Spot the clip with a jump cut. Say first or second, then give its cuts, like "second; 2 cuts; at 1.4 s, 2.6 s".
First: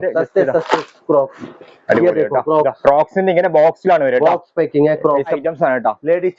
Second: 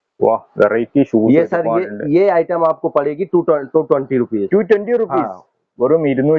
first; 1 cut; at 5.4 s